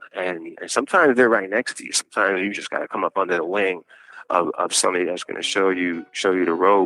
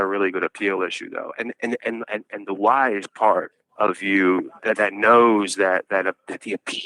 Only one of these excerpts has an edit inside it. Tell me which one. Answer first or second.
second